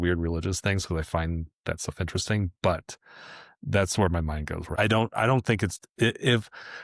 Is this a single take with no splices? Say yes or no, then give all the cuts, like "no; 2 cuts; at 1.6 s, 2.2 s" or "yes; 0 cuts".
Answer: no; 1 cut; at 4.8 s